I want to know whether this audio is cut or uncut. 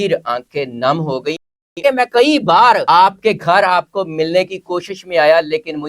cut